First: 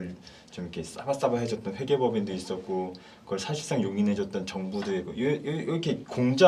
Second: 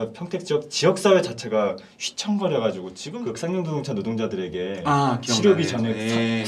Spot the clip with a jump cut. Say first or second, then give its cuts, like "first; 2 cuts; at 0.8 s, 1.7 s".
second; 1 cut; at 2.9 s